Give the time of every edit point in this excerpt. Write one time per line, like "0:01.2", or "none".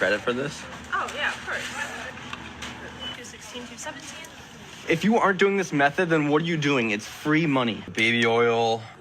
0:03.1
0:07.9